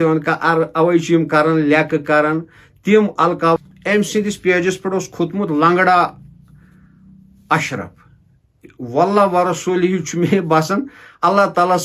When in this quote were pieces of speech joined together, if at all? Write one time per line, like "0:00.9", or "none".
0:03.6

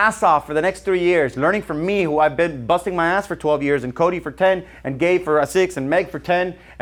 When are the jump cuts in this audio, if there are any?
none

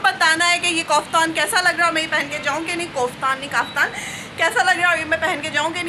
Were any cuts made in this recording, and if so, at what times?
none

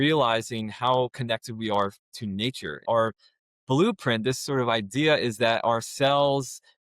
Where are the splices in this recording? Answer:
0:02.8

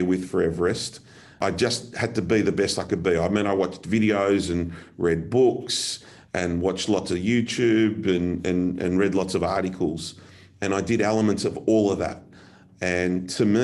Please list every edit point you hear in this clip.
0:01.4

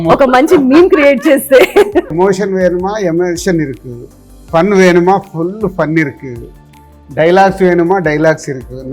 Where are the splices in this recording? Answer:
0:02.1

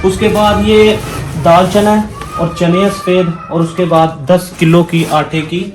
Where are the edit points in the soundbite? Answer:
none

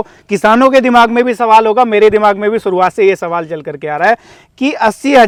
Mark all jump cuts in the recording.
none

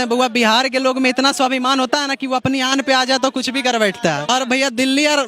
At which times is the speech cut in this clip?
0:04.3

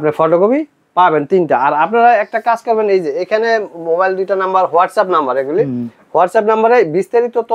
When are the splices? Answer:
none

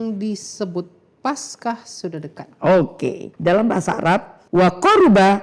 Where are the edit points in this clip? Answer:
0:03.3
0:04.4

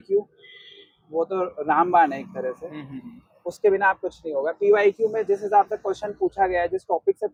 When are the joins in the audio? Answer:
none

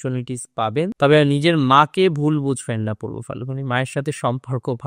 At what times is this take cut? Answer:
0:00.9

